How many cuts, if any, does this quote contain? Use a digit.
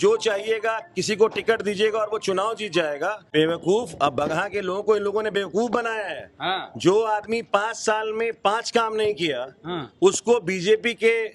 1